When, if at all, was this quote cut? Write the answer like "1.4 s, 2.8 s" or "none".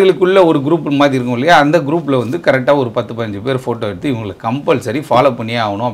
none